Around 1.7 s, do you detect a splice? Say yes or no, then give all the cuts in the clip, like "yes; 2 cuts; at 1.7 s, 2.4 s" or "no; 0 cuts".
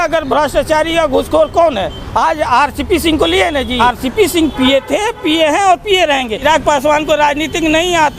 no; 2 cuts; at 3.8 s, 6.4 s